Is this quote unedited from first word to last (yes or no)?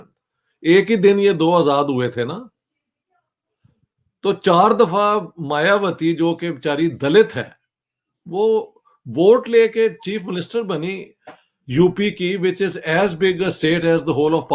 yes